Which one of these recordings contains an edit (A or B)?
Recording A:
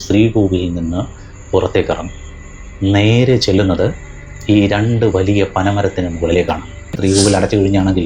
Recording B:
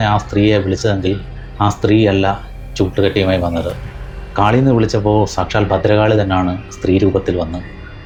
A